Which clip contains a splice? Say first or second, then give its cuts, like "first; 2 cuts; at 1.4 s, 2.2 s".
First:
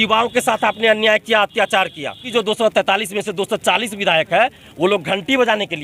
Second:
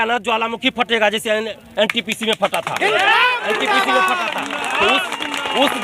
first; 1 cut; at 2.2 s